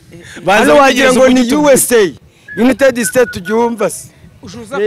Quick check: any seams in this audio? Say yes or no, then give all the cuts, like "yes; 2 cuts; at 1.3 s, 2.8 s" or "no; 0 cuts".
no; 0 cuts